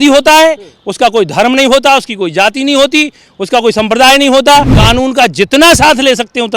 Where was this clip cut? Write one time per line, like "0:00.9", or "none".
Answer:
0:04.8